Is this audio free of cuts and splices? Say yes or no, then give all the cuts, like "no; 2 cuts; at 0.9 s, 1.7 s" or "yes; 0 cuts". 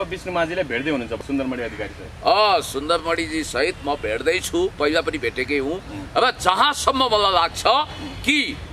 yes; 0 cuts